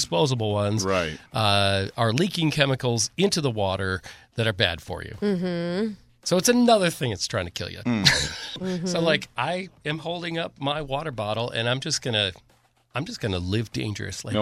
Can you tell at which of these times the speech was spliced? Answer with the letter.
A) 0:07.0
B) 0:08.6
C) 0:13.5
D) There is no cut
B